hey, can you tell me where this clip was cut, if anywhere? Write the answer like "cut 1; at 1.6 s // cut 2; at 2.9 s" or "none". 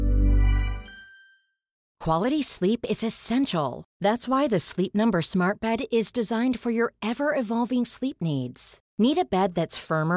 cut 1; at 1.9 s